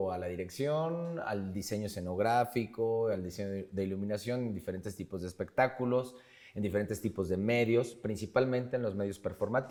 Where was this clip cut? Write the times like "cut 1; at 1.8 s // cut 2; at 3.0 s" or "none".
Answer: none